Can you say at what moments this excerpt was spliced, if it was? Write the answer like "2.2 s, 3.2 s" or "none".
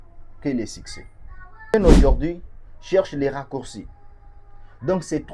1.7 s